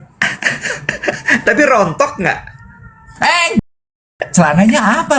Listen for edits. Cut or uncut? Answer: cut